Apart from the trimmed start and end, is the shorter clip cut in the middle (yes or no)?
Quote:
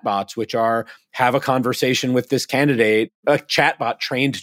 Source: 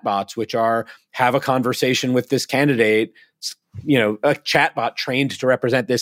yes